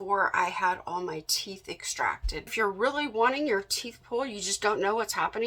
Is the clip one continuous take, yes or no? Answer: no